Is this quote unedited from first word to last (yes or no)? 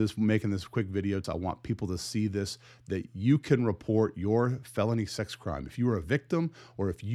no